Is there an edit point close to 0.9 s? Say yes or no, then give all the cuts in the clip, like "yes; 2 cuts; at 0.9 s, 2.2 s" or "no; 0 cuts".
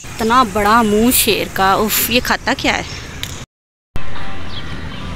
no; 1 cut; at 3.5 s